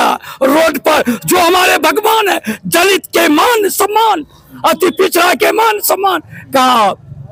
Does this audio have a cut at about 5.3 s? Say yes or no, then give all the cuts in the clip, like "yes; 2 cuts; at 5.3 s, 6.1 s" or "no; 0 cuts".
no; 0 cuts